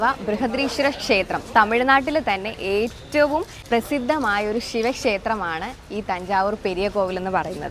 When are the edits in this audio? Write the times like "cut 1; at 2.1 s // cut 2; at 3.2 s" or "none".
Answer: cut 1; at 3.6 s